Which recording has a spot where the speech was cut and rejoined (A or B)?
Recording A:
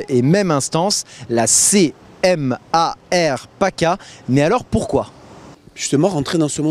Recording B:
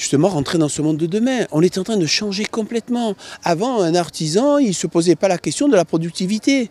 A